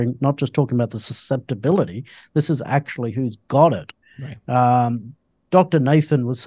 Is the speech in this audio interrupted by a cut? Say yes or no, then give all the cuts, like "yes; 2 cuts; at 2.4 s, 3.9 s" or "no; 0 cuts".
no; 0 cuts